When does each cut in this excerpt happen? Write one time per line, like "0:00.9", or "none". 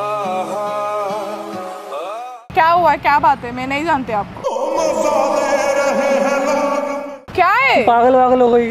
0:02.4
0:07.1